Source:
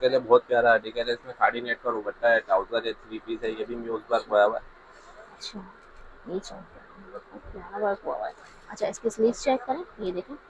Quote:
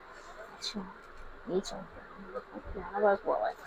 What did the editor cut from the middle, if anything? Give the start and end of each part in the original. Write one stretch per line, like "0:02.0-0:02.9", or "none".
none